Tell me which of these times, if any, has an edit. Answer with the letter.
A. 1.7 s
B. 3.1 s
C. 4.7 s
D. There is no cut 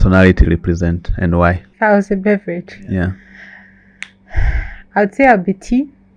A